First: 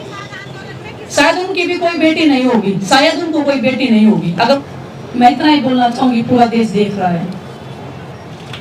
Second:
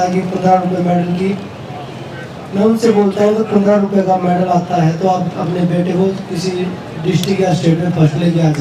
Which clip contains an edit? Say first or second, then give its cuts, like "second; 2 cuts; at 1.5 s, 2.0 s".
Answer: first; 1 cut; at 4.6 s